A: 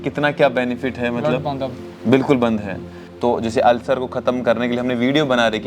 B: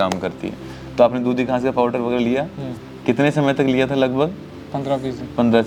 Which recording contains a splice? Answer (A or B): A